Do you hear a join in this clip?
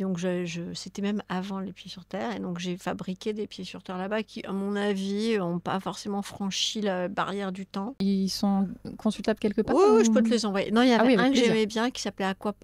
yes; 1 cut; at 8.0 s

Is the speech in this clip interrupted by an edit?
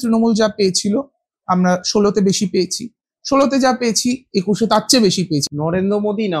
yes; 1 cut; at 5.4 s

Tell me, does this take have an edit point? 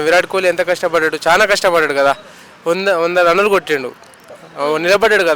no; 0 cuts

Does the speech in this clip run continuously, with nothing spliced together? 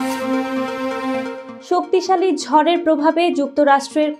yes; 0 cuts

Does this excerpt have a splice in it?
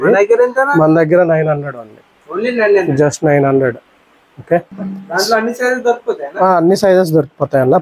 no; 0 cuts

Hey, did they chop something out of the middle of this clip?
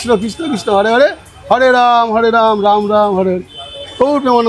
no; 0 cuts

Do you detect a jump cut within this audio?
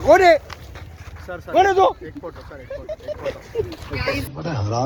no; 0 cuts

